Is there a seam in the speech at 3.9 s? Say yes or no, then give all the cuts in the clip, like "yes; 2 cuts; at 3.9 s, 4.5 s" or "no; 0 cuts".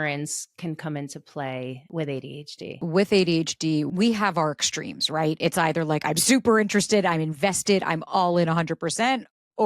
yes; 3 cuts; at 1.8 s, 2.7 s, 3.9 s